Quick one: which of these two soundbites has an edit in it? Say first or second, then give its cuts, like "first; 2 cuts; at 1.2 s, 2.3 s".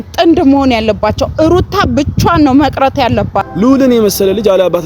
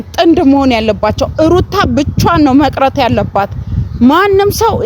first; 1 cut; at 3.4 s